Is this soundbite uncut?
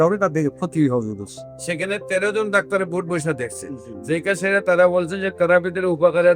yes; 0 cuts

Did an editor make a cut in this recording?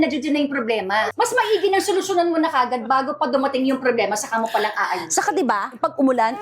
yes; 1 cut; at 1.1 s

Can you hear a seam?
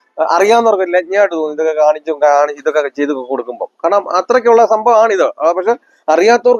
no; 0 cuts

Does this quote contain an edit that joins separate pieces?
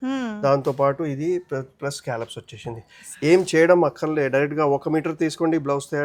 no; 0 cuts

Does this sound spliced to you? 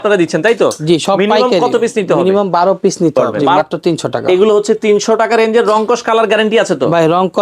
yes; 1 cut; at 3.4 s

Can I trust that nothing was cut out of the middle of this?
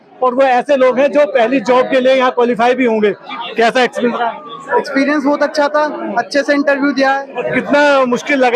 no; 2 cuts; at 3.3 s, 7.3 s

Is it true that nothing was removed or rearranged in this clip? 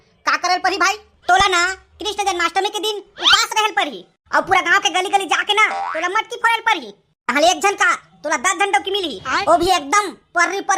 no; 1 cut; at 1.1 s

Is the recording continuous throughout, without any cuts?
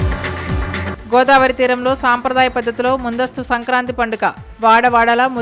no; 1 cut; at 0.9 s

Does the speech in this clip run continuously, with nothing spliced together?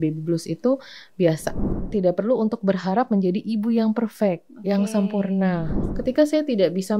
no; 2 cuts; at 1.7 s, 5.7 s

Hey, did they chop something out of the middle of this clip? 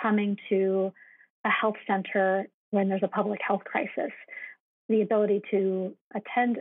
yes; 2 cuts; at 2.6 s, 4.5 s

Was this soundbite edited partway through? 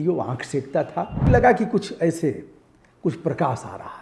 yes; 1 cut; at 1.3 s

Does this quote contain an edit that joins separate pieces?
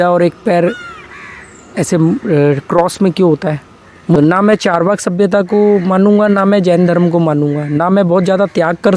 yes; 1 cut; at 4.2 s

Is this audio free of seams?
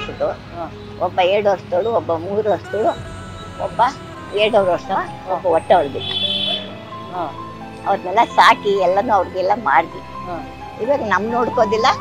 yes; 0 cuts

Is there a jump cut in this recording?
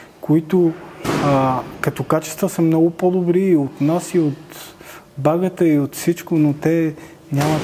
no; 0 cuts

